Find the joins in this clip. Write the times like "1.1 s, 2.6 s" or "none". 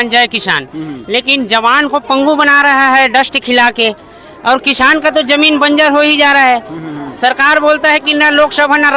none